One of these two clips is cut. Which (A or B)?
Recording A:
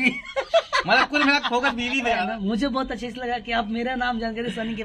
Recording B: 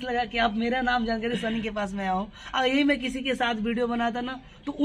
A